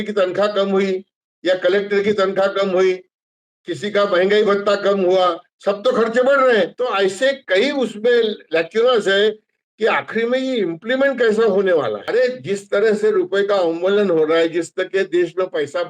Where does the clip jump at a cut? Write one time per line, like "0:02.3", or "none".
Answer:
0:06.7
0:12.0